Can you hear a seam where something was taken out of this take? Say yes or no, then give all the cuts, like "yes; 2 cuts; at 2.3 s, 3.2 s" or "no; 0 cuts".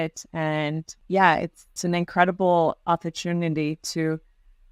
yes; 2 cuts; at 0.9 s, 1.7 s